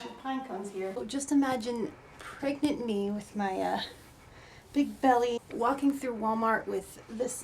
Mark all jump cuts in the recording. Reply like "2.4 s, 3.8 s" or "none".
1.0 s, 5.5 s